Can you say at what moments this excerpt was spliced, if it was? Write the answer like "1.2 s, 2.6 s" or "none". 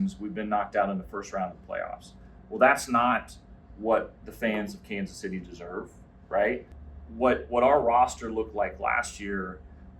6.8 s